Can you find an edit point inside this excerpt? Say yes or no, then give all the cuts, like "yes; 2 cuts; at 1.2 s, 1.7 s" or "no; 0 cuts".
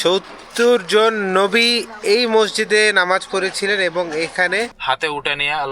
yes; 1 cut; at 4.8 s